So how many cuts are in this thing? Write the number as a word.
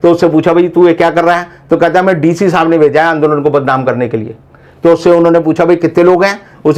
zero